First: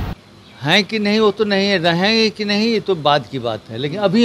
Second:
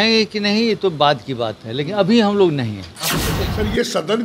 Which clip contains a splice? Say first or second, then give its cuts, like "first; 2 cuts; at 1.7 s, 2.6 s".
second; 1 cut; at 3.3 s